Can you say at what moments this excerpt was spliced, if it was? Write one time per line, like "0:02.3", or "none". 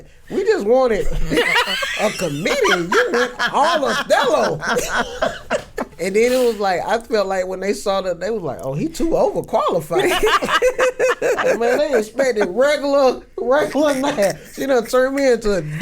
0:06.0